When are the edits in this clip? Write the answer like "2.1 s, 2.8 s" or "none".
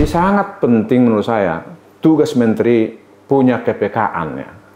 none

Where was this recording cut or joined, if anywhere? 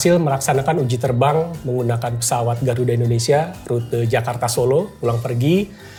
none

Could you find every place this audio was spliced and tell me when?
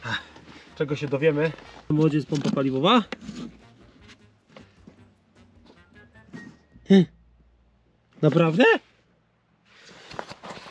none

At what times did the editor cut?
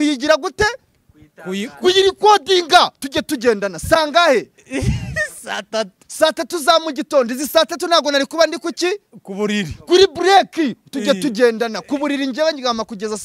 none

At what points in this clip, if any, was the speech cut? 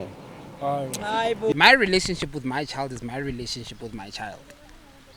1.5 s

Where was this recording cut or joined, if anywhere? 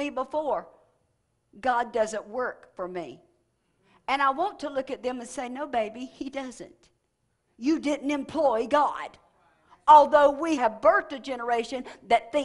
10.6 s

